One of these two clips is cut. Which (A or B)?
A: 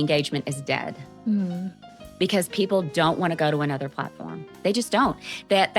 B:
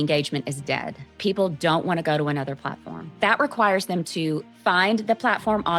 B